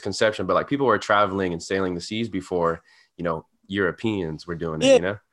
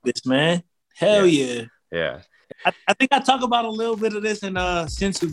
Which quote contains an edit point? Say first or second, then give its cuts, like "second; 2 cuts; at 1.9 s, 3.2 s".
second; 1 cut; at 2.5 s